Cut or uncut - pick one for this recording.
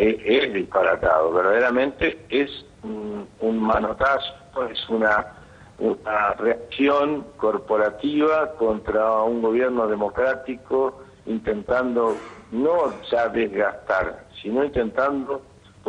uncut